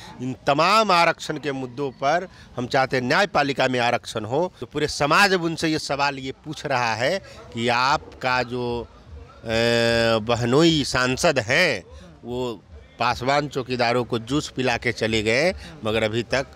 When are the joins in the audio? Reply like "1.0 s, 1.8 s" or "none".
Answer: 4.6 s